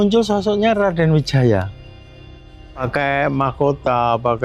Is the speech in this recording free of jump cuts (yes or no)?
yes